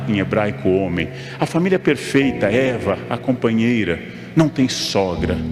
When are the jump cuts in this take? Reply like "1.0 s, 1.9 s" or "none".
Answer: none